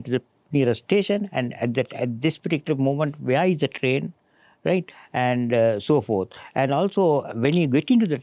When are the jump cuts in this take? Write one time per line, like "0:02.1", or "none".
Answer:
none